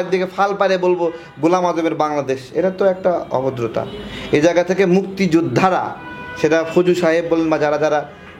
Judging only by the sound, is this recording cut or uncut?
uncut